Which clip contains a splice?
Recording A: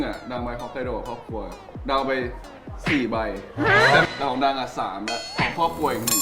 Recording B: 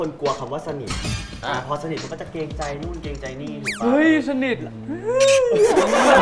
A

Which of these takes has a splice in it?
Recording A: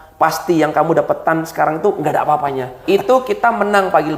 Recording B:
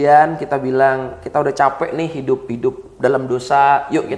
A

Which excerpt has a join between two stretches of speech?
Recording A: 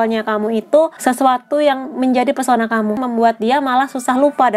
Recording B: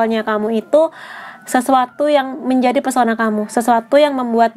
A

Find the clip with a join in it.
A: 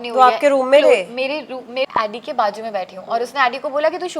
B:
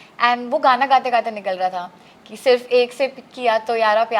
A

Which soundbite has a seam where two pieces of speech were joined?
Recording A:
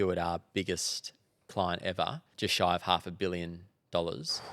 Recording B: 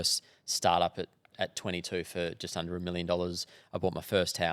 A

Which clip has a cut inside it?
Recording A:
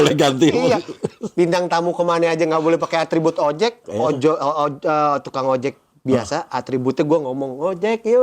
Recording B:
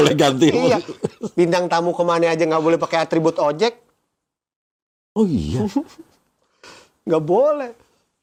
A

